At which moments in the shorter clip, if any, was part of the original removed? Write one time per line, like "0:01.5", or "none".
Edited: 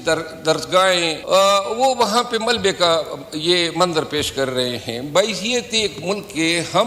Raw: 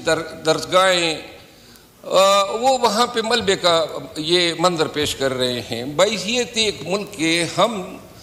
0:01.2